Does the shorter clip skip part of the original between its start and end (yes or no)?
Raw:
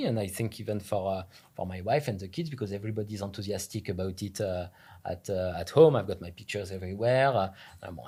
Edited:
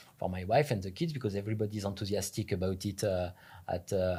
no